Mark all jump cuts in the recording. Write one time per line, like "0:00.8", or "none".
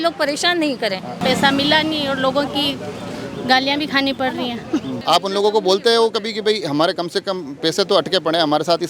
0:01.2
0:04.9